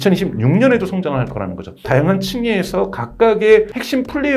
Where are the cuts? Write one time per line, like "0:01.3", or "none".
0:01.8